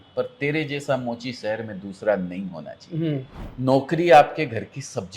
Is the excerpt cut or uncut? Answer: cut